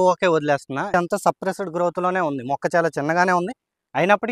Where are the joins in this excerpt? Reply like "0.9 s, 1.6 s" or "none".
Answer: 0.9 s